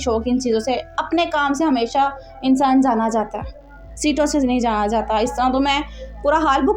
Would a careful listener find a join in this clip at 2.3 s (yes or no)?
no